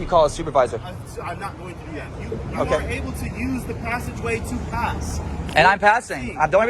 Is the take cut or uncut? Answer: cut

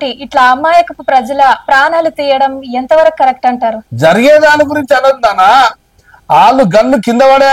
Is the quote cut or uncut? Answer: cut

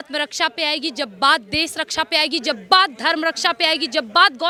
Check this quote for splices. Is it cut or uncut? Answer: uncut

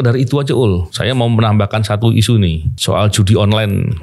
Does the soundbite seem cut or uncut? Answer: cut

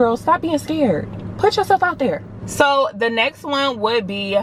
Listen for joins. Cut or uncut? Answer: uncut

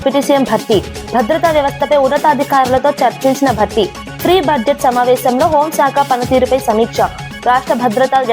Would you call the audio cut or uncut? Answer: uncut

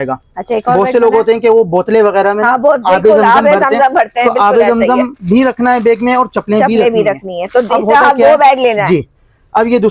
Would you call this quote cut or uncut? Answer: uncut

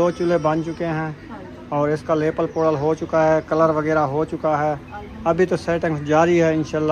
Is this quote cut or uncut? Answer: uncut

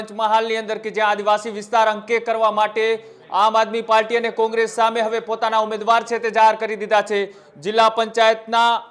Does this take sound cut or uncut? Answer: uncut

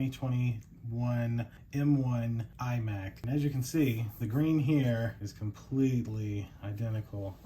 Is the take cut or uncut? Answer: cut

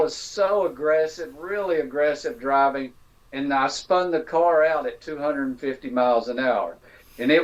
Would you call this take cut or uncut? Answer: uncut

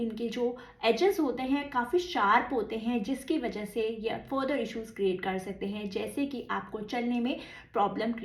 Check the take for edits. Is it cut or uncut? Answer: uncut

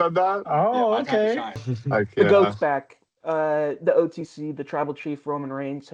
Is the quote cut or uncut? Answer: cut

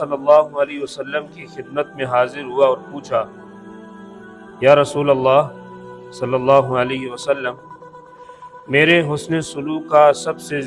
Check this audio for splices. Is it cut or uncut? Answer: uncut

